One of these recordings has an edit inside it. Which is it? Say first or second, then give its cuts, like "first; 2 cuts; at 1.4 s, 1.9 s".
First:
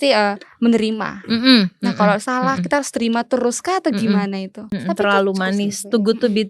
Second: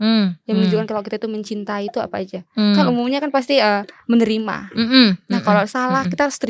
first; 1 cut; at 4.7 s